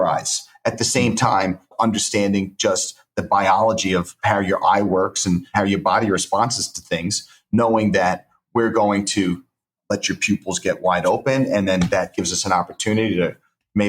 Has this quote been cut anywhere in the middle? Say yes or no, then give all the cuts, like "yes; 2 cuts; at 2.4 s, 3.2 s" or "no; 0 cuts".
yes; 4 cuts; at 1.7 s, 4.1 s, 5.5 s, 9.8 s